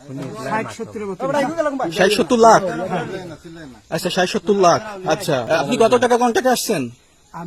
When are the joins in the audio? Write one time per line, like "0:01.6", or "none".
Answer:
0:05.5